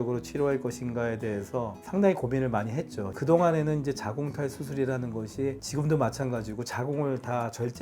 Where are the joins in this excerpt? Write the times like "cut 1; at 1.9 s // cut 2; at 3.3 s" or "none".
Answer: cut 1; at 3.1 s